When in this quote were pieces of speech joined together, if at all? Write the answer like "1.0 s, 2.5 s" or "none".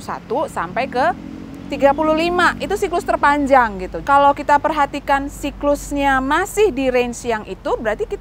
3.9 s